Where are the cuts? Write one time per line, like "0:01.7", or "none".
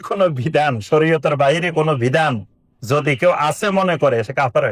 none